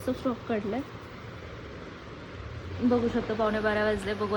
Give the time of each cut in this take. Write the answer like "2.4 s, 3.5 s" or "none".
none